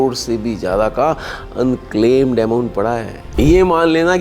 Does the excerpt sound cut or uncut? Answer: cut